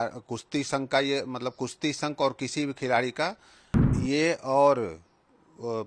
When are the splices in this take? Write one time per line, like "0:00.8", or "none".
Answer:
0:03.9